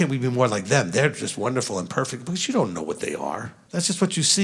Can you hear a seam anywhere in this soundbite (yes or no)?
yes